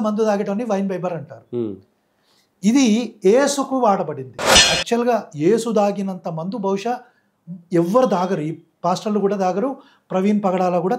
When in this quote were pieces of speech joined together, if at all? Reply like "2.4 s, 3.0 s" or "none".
4.6 s